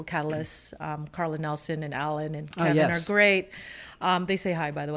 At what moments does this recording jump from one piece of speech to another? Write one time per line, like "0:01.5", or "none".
none